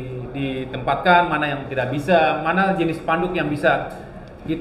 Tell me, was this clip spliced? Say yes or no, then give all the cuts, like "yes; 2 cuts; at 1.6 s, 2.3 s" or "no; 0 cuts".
no; 0 cuts